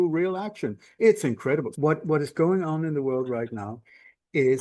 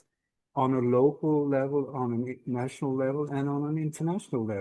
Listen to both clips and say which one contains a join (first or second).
first